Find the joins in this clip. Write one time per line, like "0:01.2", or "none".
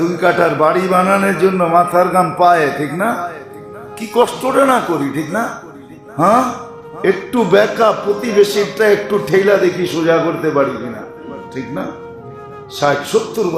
none